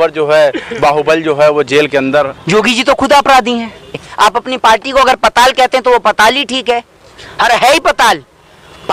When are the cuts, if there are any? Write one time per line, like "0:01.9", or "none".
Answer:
0:04.1